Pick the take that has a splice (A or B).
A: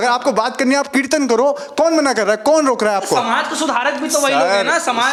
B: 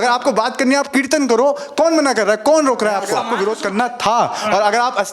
B